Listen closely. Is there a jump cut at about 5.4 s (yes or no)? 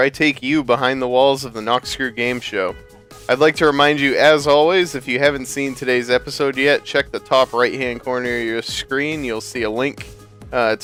no